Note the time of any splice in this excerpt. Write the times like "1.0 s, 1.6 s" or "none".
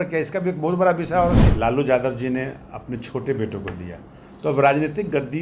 1.5 s